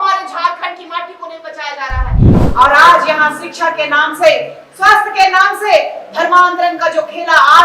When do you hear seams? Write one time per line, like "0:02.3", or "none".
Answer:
0:02.4

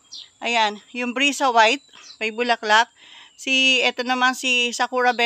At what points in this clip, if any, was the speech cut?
none

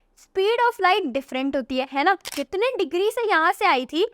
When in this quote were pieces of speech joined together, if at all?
0:02.3

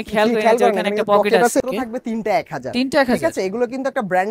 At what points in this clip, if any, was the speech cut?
0:01.6

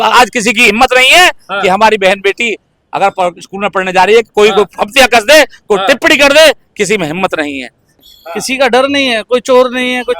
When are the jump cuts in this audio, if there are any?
0:07.9

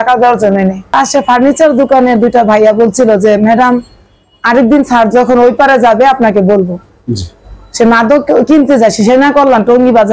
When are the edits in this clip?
0:00.9

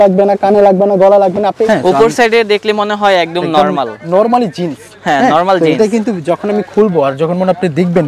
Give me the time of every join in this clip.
0:01.7

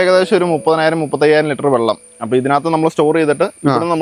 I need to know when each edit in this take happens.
0:02.1

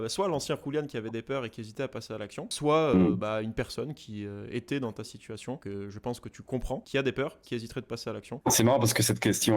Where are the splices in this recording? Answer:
0:02.5
0:05.6
0:06.8

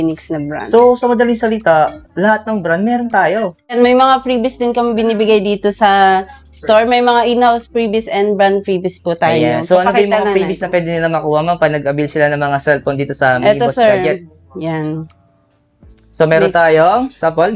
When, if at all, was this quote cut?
0:03.6

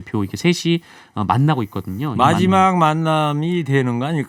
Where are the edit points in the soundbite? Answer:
none

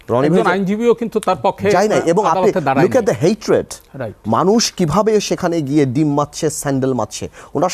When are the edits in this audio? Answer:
none

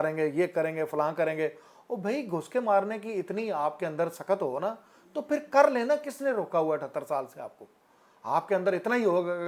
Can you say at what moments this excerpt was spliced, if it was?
none

